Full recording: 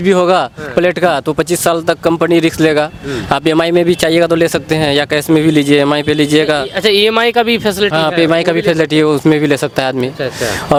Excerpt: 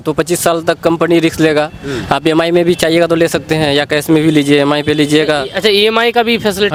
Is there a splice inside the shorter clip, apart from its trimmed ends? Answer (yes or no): no